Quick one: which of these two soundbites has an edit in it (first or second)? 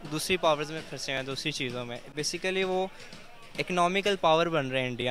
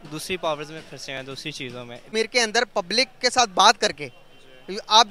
second